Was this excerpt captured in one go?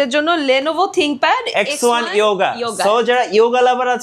yes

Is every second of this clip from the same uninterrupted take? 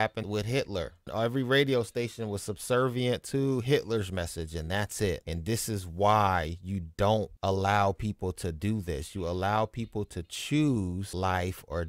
yes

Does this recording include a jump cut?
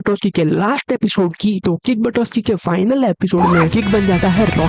no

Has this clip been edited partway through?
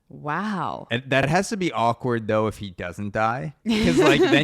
yes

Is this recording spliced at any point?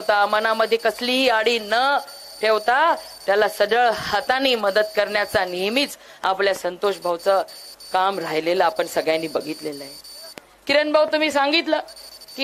no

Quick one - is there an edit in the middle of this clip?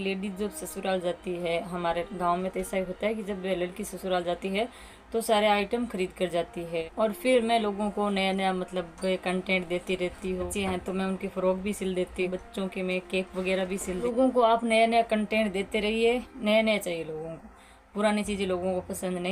yes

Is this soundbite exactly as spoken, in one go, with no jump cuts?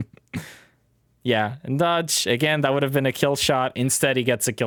yes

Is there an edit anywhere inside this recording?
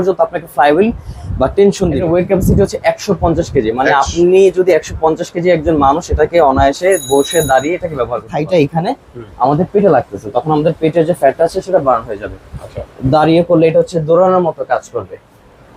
yes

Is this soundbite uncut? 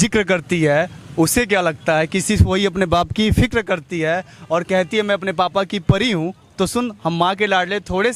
yes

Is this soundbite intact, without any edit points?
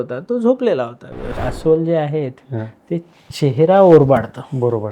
no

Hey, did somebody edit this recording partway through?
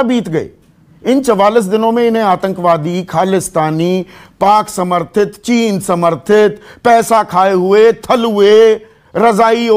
no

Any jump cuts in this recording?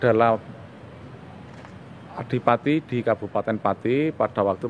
no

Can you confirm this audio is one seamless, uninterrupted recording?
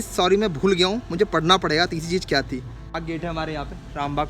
no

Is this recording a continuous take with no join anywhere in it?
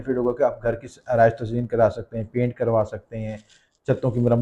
yes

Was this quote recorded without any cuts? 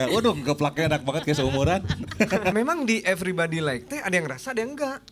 no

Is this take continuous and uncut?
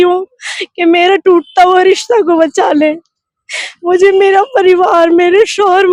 yes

